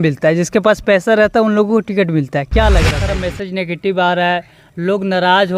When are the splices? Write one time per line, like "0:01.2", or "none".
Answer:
0:03.1

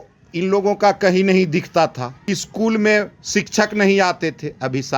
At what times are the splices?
0:02.1

